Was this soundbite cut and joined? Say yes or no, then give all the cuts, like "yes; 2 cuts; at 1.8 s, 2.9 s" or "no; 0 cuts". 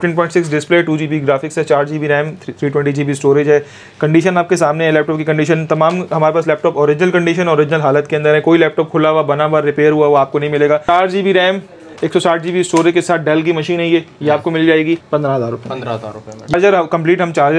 yes; 3 cuts; at 10.9 s, 15.0 s, 16.5 s